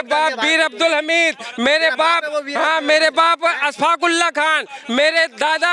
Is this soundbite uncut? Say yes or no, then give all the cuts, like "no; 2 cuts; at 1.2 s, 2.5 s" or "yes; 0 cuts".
yes; 0 cuts